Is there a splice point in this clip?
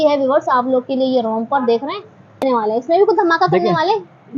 yes; 1 cut; at 2.4 s

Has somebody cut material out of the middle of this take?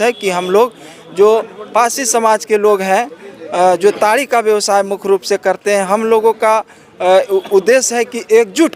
no; 0 cuts

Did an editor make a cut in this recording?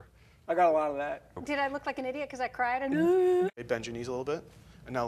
yes; 2 cuts; at 1.4 s, 3.5 s

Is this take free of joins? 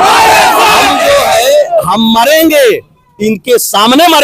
yes; 0 cuts

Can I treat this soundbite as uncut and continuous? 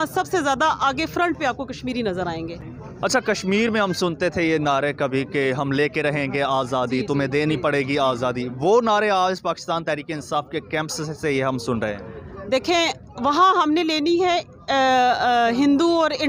yes; 0 cuts

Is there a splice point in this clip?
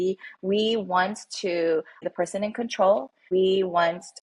yes; 2 cuts; at 2.1 s, 3.2 s

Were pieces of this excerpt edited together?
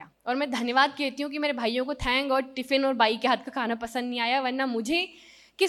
no; 0 cuts

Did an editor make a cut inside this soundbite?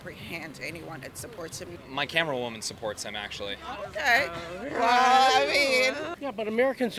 yes; 2 cuts; at 1.7 s, 6.1 s

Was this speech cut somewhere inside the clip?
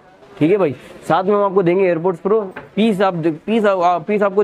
no; 0 cuts

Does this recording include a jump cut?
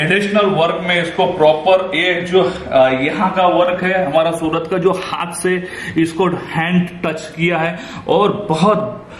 no; 0 cuts

